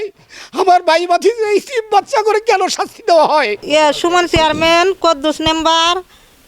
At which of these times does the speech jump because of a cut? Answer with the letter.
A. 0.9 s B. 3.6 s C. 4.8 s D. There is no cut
B